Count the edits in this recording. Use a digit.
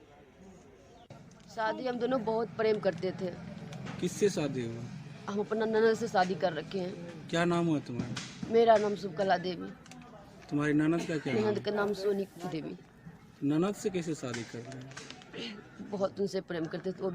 1